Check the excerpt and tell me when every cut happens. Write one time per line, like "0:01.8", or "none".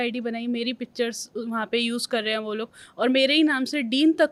none